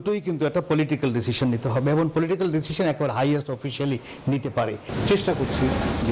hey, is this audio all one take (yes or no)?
no